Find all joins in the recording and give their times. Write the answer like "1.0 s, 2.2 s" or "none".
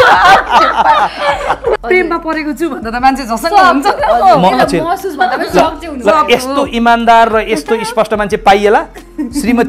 1.8 s